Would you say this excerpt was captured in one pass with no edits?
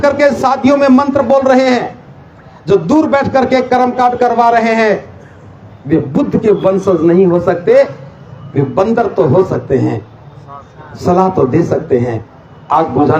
yes; 0 cuts

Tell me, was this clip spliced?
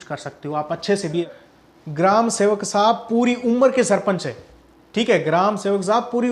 yes; 1 cut; at 1.4 s

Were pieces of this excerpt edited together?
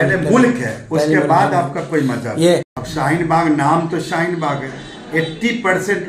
yes; 1 cut; at 2.8 s

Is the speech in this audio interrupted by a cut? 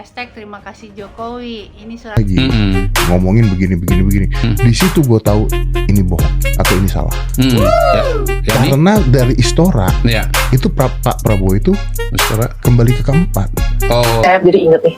yes; 2 cuts; at 2.2 s, 14.2 s

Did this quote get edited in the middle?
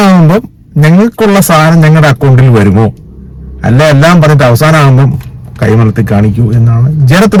no; 0 cuts

